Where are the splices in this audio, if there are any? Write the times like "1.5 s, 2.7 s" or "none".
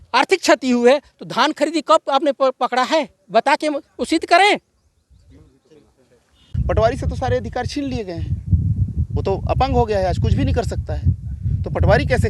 6.4 s